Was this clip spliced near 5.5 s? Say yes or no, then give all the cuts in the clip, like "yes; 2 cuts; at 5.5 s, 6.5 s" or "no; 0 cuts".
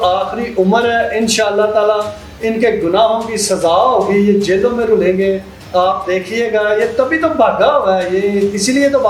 no; 0 cuts